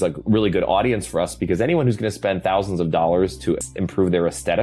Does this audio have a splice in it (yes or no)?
yes